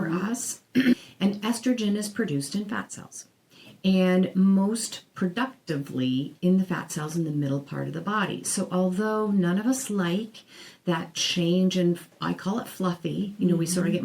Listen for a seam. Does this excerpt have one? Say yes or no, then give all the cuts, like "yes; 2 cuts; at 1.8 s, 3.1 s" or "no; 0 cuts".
yes; 1 cut; at 0.9 s